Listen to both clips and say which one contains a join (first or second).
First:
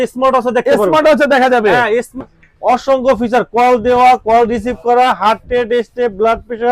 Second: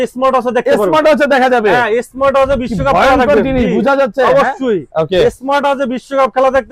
first